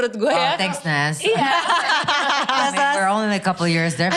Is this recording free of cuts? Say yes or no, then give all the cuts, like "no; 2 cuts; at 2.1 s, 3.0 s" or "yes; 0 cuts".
yes; 0 cuts